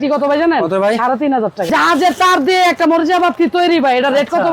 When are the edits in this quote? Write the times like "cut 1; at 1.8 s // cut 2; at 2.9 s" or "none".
cut 1; at 1.7 s